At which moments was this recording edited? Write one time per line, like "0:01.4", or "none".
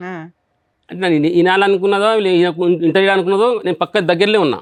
none